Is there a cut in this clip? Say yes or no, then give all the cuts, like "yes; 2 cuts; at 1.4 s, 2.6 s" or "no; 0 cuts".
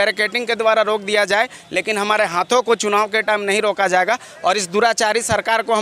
no; 0 cuts